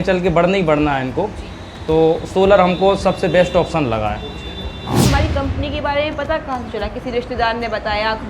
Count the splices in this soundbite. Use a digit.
1